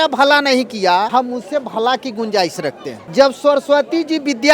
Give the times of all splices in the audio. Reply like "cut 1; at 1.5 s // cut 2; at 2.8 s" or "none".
cut 1; at 1.1 s // cut 2; at 2.9 s